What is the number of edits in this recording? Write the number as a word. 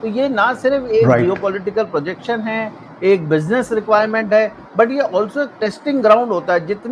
zero